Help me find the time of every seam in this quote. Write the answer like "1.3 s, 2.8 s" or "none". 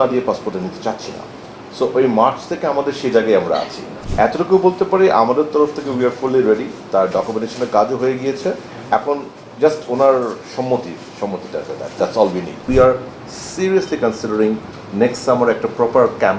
4.0 s, 12.7 s